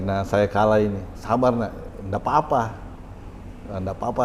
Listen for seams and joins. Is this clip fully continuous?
no; 1 cut; at 1.1 s

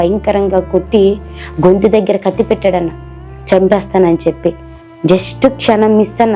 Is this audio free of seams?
yes; 0 cuts

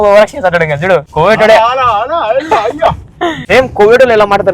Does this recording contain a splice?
yes; 2 cuts; at 1.1 s, 3.4 s

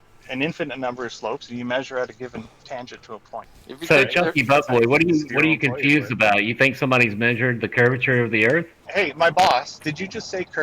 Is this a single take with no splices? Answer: no; 2 cuts; at 3.4 s, 8.8 s

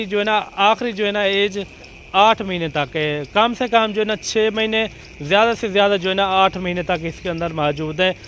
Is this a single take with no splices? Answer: yes; 0 cuts

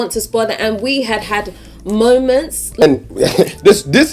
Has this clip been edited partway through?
yes; 1 cut; at 2.8 s

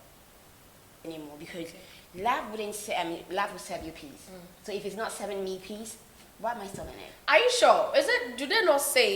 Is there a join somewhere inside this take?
yes; 1 cut; at 1.0 s

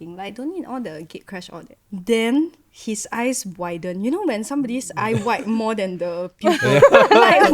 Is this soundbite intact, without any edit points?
yes; 0 cuts

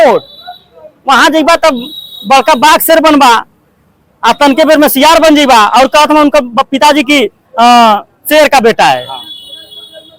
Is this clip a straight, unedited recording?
yes; 0 cuts

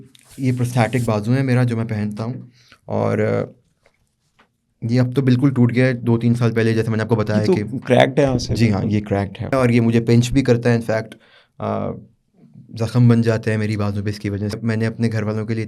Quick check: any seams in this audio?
yes; 2 cuts; at 9.5 s, 14.6 s

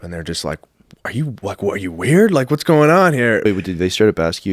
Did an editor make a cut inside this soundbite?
yes; 1 cut; at 3.4 s

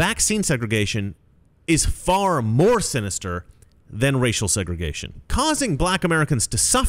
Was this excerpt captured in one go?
no; 1 cut; at 5.2 s

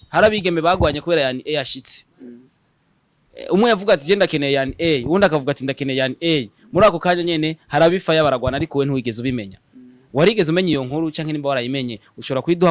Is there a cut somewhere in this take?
no; 0 cuts

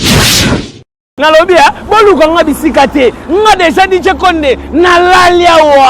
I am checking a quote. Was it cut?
yes; 1 cut; at 1.1 s

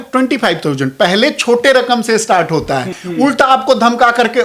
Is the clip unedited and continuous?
no; 1 cut; at 3.0 s

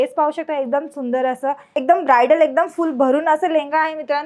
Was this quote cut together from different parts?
yes; 1 cut; at 1.7 s

